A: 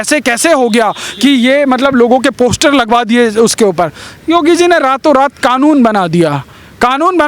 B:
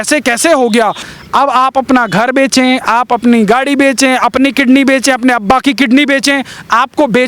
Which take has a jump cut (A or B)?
B